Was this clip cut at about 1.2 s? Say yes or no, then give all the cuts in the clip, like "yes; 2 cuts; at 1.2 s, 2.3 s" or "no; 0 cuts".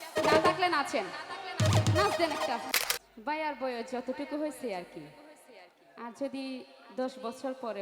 no; 1 cut; at 2.7 s